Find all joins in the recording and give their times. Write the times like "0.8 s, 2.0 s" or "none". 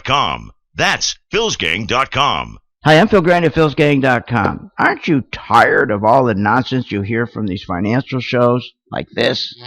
0.7 s, 2.6 s

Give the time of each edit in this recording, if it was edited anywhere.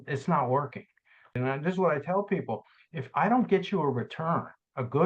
1.4 s

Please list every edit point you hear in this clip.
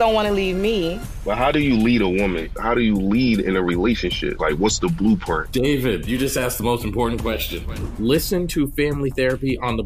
none

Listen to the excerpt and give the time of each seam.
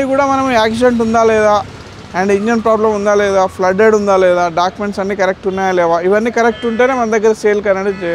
none

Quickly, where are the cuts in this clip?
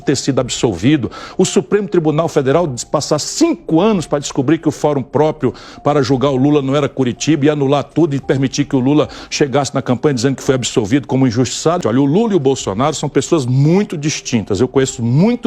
11.8 s

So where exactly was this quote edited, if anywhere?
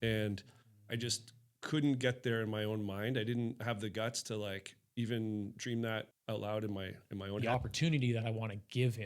6.1 s, 7.4 s

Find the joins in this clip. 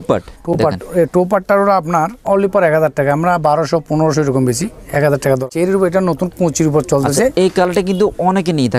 2.2 s, 5.4 s

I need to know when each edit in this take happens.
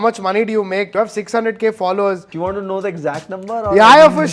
0.9 s, 2.3 s

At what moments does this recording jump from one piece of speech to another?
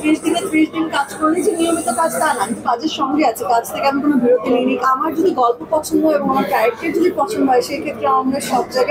4.8 s

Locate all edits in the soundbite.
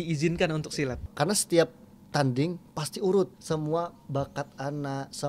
1.1 s, 3.4 s

